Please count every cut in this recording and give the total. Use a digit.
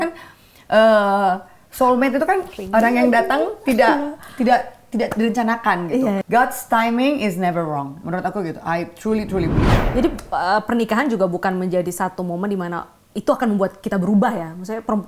2